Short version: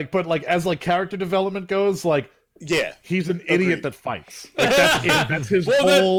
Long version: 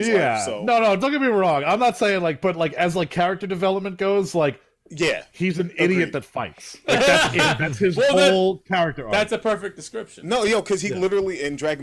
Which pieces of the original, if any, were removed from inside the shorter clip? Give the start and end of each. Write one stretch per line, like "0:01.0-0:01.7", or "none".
none